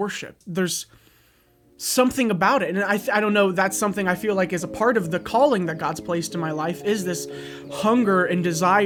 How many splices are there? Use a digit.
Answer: 0